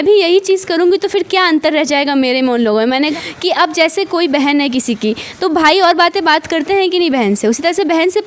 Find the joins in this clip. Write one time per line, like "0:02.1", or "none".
0:03.1